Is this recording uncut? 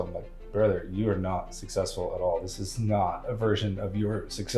yes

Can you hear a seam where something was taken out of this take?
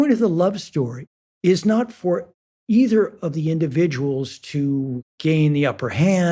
no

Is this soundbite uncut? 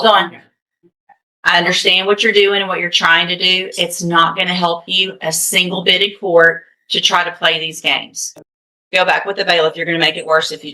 no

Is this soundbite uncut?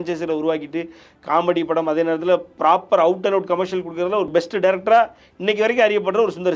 no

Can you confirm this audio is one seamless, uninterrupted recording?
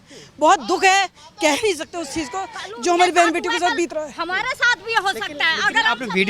yes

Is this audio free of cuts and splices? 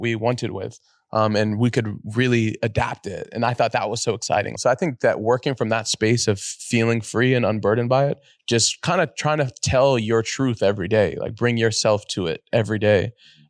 no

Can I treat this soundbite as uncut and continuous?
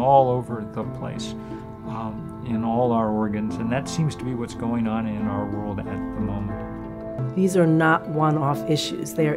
no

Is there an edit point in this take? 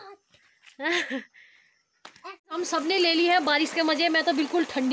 yes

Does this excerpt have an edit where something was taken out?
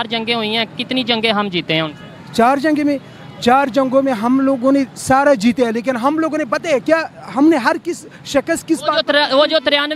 no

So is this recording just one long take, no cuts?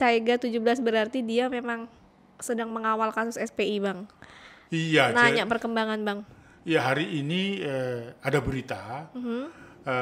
yes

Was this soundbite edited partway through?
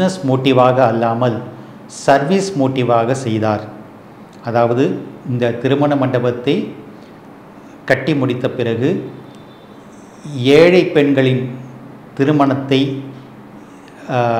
no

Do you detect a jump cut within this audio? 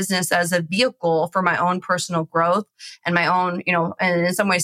no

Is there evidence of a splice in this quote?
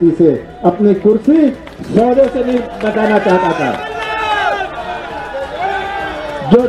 no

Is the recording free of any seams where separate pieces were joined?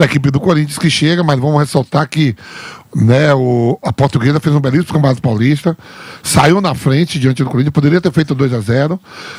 yes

